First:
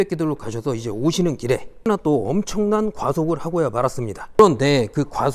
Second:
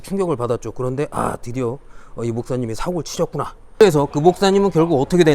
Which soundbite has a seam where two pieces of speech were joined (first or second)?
second